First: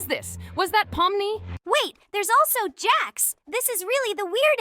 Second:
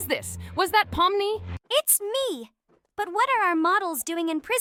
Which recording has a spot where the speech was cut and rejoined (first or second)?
first